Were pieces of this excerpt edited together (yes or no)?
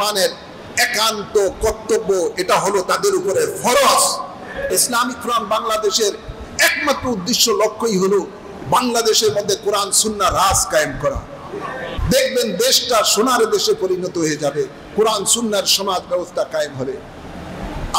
yes